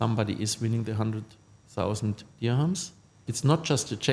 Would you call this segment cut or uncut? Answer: cut